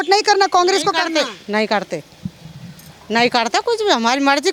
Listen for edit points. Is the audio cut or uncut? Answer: uncut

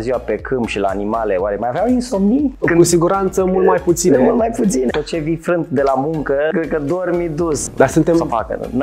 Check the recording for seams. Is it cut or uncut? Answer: cut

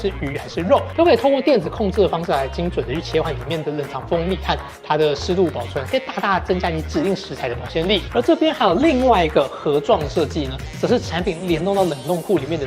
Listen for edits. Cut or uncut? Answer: cut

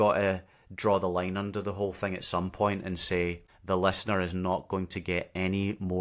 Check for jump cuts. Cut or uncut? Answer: cut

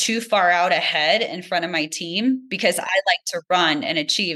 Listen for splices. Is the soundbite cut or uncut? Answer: cut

